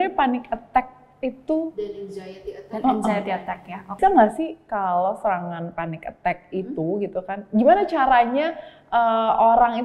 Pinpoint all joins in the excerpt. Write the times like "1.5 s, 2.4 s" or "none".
4.0 s